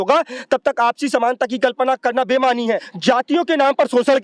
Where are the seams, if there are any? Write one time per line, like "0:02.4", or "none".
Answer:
0:02.9